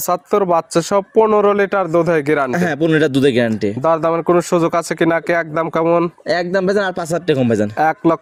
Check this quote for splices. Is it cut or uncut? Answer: uncut